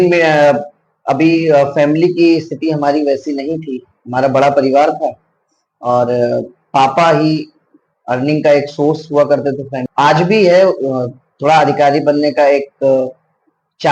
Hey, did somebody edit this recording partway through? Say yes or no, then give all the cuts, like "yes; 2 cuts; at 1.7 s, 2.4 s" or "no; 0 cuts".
yes; 1 cut; at 9.8 s